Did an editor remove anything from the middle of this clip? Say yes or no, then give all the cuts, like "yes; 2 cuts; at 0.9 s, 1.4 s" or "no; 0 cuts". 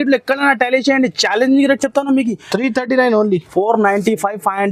no; 0 cuts